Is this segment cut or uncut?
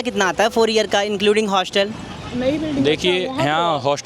uncut